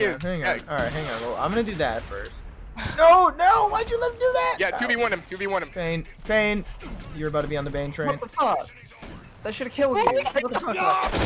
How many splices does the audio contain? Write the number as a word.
zero